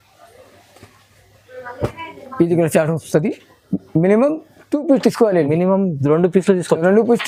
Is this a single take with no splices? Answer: yes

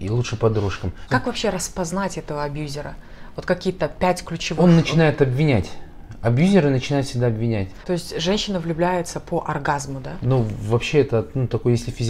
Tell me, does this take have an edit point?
yes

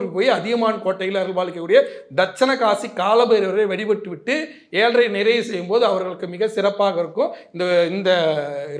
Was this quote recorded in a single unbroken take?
yes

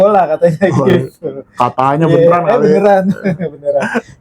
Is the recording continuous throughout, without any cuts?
yes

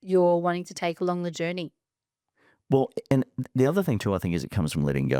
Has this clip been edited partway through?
no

